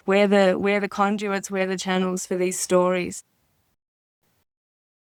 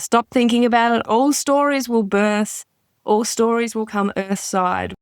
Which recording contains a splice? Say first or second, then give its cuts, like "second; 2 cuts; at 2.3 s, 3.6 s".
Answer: second; 1 cut; at 1.0 s